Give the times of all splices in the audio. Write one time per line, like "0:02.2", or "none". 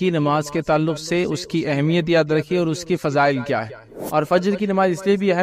0:04.0

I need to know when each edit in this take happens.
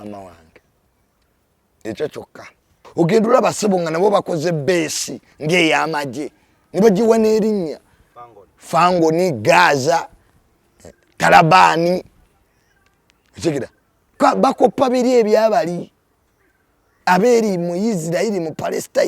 0:02.8

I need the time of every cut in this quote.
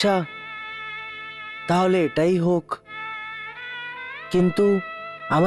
none

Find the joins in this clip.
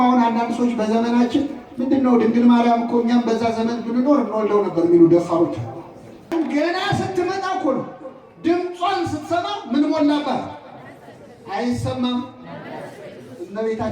0:06.3

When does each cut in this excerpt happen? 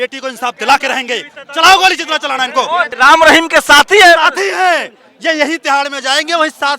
0:02.9

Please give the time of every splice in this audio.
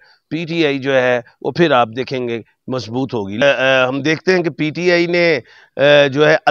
0:03.4

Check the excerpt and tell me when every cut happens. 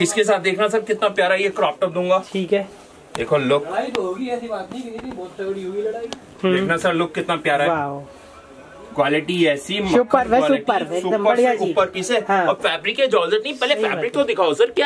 none

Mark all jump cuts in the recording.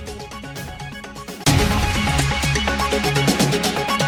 none

